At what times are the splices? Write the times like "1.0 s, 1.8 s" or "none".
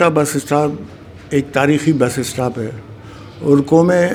none